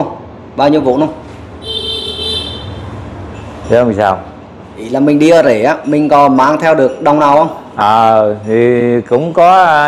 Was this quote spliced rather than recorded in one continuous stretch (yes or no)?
no